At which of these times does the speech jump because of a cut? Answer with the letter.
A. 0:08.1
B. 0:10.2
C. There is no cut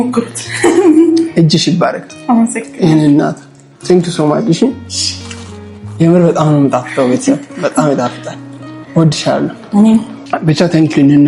B